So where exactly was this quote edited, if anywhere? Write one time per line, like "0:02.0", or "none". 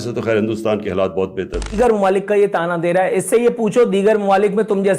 0:01.7